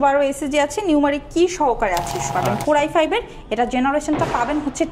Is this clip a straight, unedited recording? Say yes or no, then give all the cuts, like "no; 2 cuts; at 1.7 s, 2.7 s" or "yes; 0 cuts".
no; 1 cut; at 2.3 s